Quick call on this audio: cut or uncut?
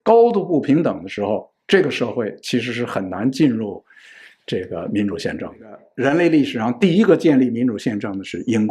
cut